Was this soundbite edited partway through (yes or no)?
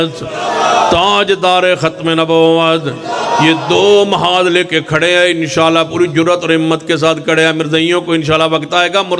no